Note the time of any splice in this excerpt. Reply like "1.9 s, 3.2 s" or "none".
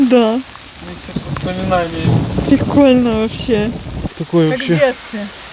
4.2 s